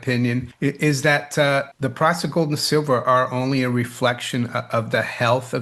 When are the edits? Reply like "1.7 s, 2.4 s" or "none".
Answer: none

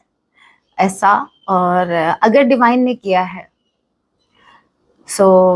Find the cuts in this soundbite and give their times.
none

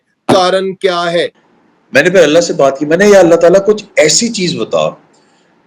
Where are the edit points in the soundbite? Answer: 1.4 s

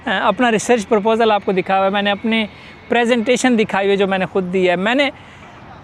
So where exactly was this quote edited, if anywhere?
none

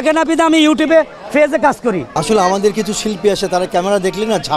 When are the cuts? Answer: 2.1 s

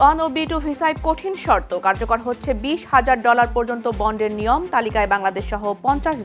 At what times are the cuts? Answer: none

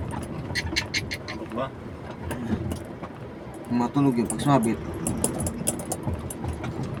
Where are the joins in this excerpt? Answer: none

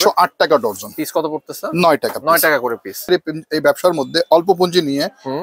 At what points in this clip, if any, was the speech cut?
3.1 s

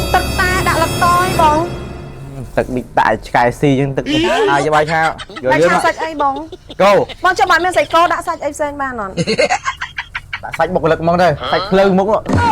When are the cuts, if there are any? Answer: 4.4 s, 7.1 s, 11.4 s

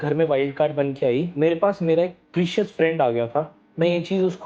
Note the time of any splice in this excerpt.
1.3 s, 3.5 s

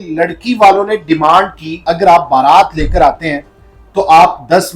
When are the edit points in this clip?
1.8 s

